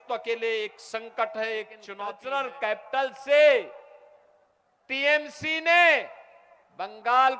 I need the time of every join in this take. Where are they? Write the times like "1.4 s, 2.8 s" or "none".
1.8 s